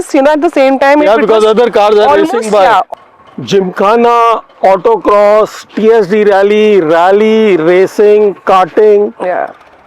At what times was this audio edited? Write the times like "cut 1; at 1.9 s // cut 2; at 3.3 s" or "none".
cut 1; at 2.9 s